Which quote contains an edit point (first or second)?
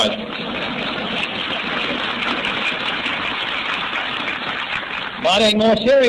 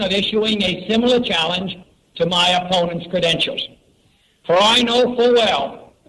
first